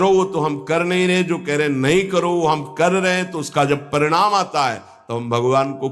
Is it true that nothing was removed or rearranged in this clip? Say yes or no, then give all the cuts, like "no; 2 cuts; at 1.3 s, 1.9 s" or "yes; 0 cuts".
yes; 0 cuts